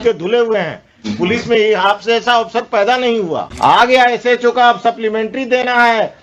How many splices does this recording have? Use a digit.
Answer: 1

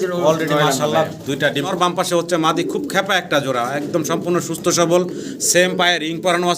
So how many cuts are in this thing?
1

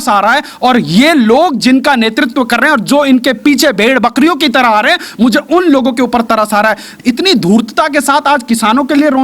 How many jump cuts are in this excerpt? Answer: 1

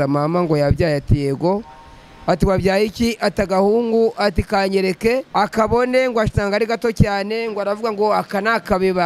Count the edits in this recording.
1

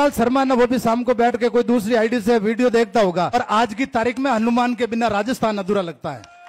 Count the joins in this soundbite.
1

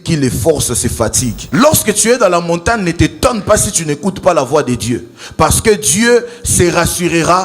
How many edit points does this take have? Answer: 1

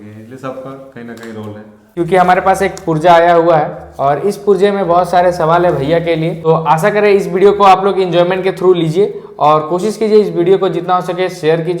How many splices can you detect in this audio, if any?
2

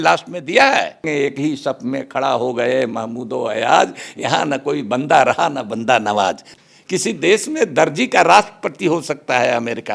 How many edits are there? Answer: 2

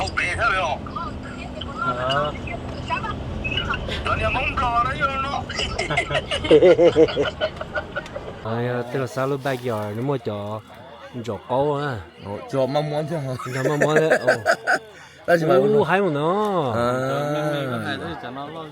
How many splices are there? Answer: 1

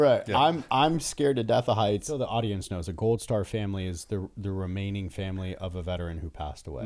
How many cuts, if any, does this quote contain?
1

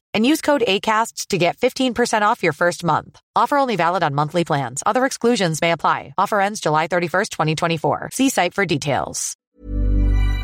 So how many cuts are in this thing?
1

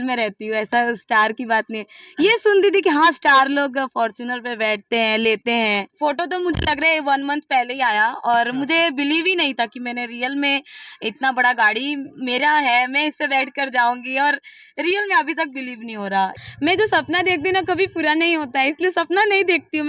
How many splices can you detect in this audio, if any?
2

